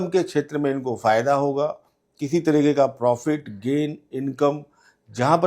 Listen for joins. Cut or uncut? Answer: uncut